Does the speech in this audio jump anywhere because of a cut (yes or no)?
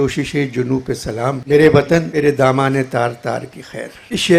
no